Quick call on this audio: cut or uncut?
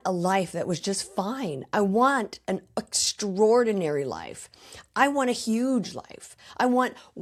uncut